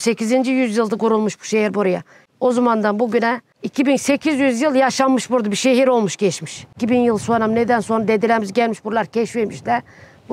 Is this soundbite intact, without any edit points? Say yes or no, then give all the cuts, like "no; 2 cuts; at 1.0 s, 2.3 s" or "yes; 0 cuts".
yes; 0 cuts